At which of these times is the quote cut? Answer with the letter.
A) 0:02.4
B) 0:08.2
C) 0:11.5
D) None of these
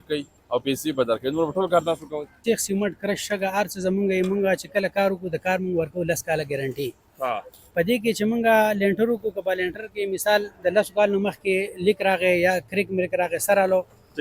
A